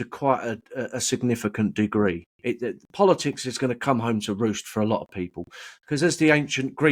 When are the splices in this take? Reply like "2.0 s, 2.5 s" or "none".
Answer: none